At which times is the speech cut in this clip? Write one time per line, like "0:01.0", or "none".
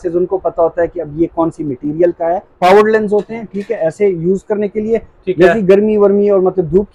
0:02.6